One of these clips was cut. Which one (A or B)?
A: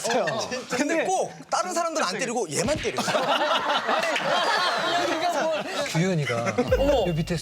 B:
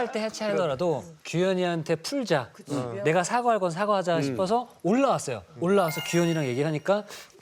A